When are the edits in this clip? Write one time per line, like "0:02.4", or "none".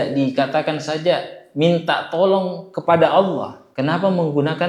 none